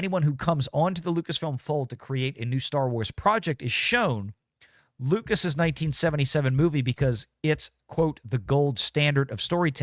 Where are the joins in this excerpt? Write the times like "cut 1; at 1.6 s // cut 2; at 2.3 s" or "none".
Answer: none